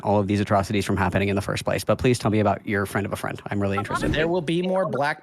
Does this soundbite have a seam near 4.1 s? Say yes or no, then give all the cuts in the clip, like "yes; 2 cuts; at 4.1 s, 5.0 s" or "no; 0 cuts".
yes; 1 cut; at 4.1 s